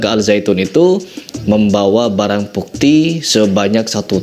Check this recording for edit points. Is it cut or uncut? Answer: uncut